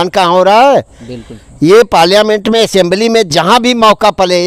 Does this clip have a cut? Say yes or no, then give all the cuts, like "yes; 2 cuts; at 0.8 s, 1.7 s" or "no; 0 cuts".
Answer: no; 0 cuts